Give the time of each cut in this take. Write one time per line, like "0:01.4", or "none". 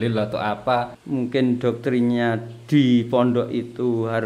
0:01.0